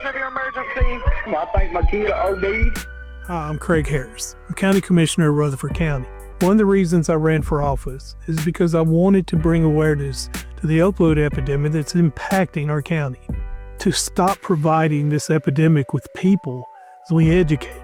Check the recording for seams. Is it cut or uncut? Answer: uncut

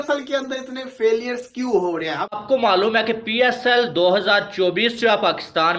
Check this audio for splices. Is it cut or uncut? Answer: cut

